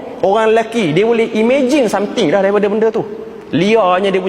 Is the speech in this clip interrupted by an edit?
no; 0 cuts

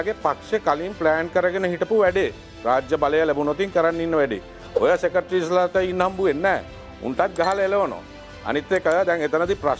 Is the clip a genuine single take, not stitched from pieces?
yes; 0 cuts

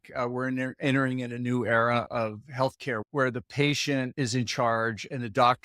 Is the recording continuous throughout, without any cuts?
no; 3 cuts; at 2.1 s, 3.1 s, 4.1 s

